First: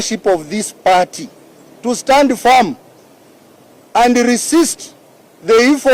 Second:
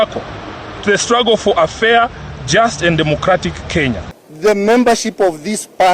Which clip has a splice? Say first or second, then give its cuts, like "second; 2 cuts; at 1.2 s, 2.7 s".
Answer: second; 1 cut; at 4.0 s